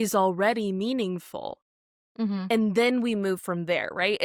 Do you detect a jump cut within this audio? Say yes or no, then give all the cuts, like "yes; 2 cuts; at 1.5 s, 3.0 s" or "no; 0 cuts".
no; 0 cuts